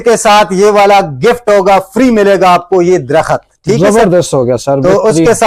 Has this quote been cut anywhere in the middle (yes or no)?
no